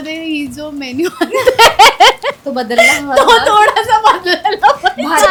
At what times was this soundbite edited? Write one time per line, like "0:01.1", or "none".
none